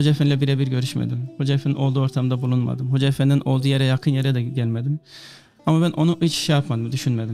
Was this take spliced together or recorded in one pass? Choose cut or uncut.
uncut